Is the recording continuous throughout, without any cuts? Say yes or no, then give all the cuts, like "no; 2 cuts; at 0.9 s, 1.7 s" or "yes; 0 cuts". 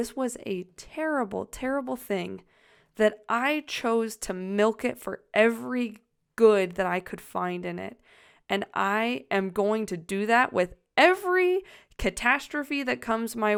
yes; 0 cuts